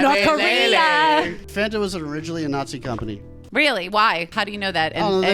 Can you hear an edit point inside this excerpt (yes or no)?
yes